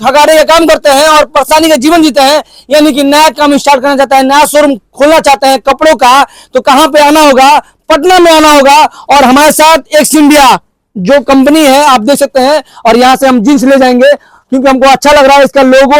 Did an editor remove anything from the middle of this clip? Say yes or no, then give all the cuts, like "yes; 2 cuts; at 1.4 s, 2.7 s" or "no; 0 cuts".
no; 0 cuts